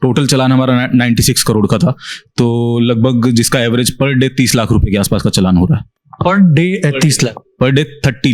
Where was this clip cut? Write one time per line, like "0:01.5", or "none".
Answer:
none